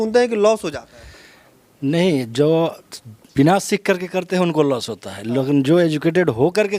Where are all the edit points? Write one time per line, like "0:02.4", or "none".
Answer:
none

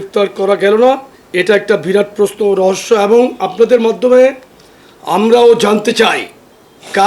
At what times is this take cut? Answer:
none

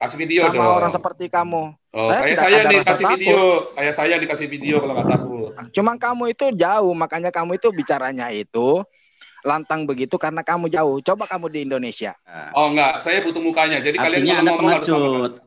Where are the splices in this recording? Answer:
0:12.4

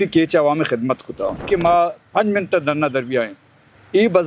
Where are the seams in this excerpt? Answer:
0:01.4

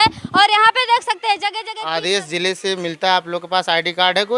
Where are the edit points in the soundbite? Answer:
0:01.7

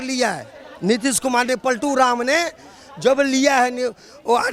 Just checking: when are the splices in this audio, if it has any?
none

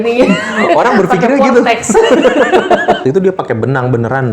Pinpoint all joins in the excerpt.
0:03.0

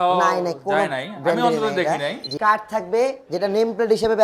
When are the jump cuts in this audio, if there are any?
0:02.2

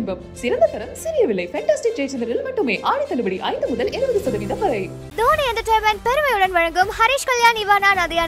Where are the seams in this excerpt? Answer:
0:05.0

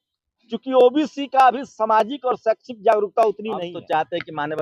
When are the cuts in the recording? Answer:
0:03.7

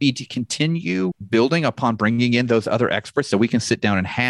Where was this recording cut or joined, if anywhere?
0:01.2

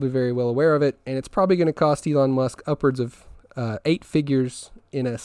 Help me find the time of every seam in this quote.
none

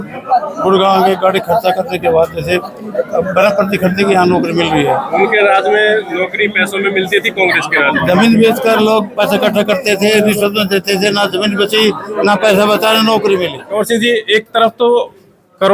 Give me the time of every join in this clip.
0:13.6

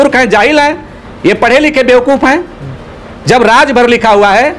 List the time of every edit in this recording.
none

